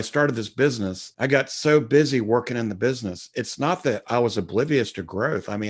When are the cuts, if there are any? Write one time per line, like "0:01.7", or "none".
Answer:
0:01.0